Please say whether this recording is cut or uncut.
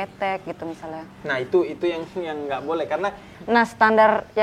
cut